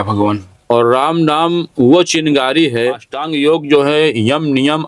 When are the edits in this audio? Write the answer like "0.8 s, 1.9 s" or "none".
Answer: 3.2 s

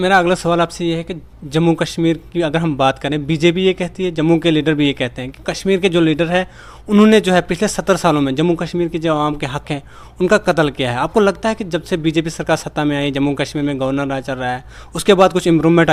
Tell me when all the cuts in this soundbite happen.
none

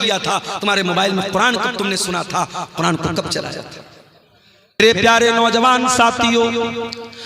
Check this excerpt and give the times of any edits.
4.8 s

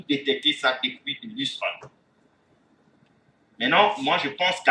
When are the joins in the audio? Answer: none

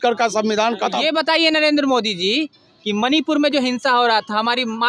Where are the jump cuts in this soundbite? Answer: 1.0 s

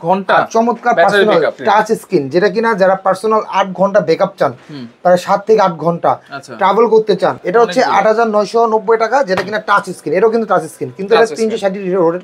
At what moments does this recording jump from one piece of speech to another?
1.6 s, 7.4 s

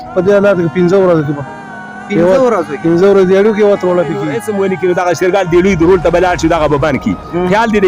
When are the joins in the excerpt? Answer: 4.4 s

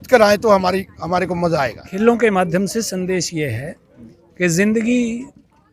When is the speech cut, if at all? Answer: 1.8 s

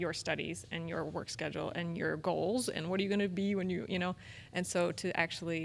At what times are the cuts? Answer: none

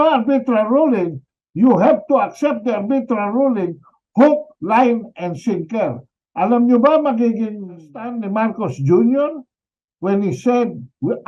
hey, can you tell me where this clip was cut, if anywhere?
8.1 s

